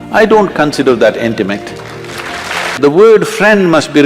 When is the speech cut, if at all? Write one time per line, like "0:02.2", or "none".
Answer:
0:02.8